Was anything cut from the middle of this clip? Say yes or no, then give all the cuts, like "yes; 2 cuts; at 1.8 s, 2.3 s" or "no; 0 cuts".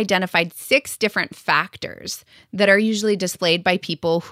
no; 0 cuts